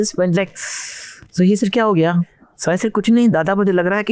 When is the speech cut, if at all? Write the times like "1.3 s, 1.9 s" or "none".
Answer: 2.3 s